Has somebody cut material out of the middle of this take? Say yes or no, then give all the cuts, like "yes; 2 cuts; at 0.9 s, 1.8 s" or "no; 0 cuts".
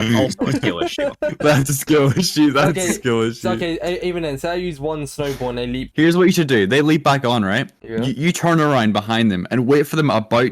yes; 1 cut; at 5.9 s